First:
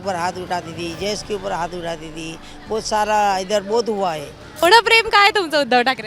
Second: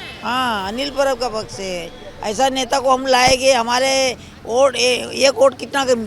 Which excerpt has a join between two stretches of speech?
first; 1 cut; at 4.6 s

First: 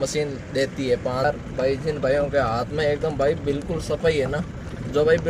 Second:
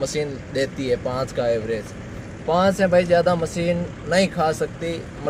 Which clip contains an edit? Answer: first; 1 cut; at 1.2 s

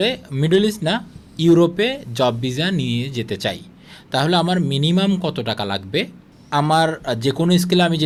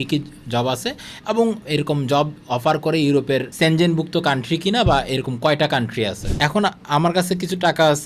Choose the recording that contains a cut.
second; 3 cuts; at 1.6 s, 3.5 s, 6.2 s

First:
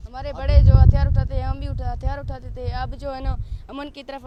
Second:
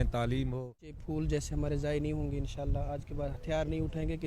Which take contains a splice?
second; 1 cut; at 1.0 s

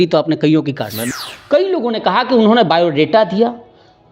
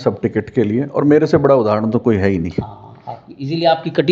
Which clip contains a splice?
first; 1 cut; at 1.1 s

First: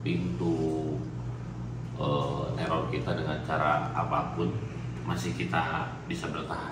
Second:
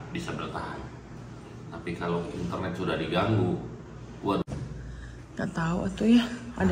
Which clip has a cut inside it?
second; 1 cut; at 4.4 s

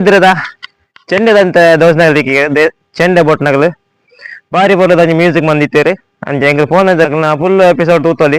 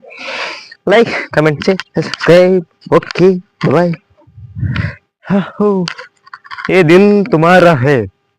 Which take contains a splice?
first; 1 cut; at 7.1 s

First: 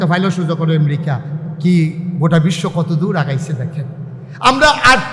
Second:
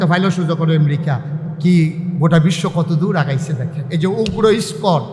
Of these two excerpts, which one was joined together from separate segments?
second; 1 cut; at 3.8 s

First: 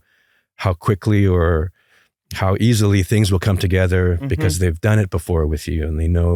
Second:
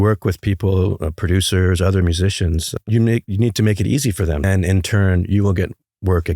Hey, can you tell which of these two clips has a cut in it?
second; 2 cuts; at 2.7 s, 4.4 s

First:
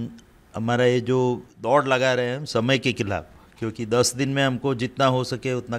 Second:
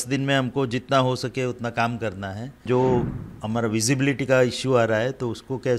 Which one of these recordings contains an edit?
second; 1 cut; at 2.6 s

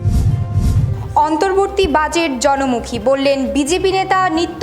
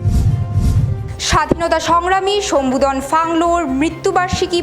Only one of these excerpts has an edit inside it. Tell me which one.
second; 1 cut; at 0.9 s

